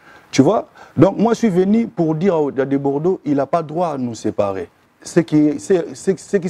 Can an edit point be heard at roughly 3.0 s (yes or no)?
no